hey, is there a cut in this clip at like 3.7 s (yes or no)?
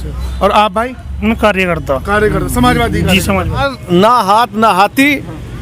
yes